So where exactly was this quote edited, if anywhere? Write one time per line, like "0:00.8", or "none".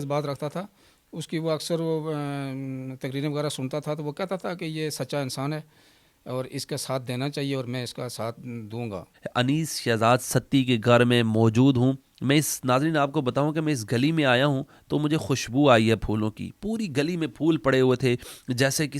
0:09.2